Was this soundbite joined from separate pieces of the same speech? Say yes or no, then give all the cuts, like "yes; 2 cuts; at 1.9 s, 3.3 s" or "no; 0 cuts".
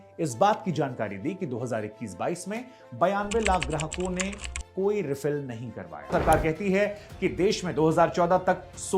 yes; 1 cut; at 6.1 s